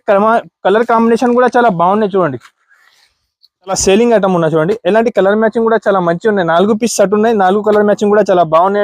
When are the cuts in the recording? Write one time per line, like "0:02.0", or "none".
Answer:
0:03.8